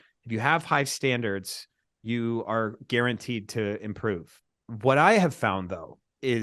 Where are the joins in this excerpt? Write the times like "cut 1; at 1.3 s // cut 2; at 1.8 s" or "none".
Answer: cut 1; at 4.4 s

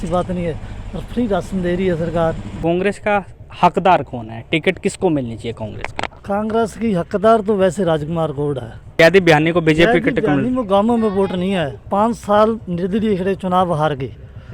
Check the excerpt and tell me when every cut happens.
cut 1; at 2.5 s // cut 2; at 8.9 s

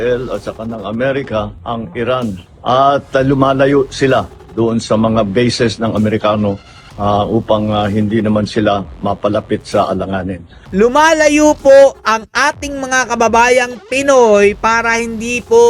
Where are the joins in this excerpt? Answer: cut 1; at 2.4 s // cut 2; at 10.6 s

